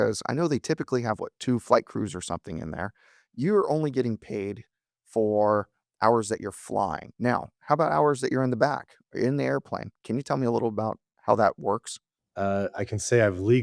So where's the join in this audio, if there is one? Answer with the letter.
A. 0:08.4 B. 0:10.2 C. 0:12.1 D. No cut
D